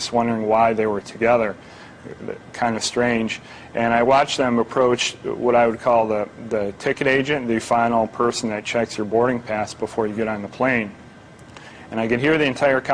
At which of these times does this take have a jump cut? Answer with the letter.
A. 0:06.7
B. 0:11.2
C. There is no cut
A